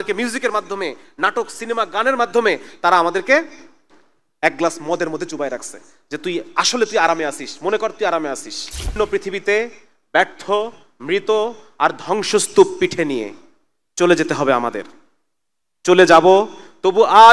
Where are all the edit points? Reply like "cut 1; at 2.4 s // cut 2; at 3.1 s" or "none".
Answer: cut 1; at 8.9 s